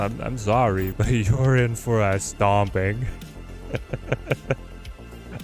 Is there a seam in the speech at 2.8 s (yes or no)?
no